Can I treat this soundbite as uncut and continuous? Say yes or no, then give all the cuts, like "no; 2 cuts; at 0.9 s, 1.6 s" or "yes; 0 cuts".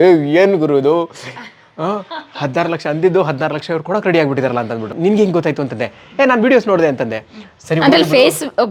no; 1 cut; at 4.8 s